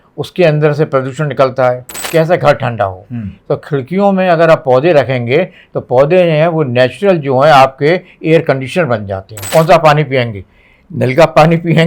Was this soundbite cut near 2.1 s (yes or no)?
yes